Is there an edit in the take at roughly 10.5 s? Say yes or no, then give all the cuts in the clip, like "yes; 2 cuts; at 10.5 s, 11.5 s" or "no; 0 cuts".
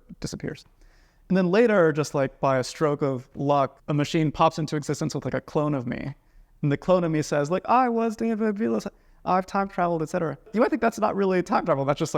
yes; 2 cuts; at 3.8 s, 10.5 s